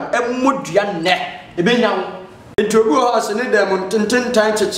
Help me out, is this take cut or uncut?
cut